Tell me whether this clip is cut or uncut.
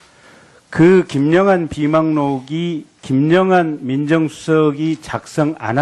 cut